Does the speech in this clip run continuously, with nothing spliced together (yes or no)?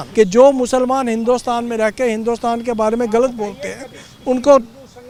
yes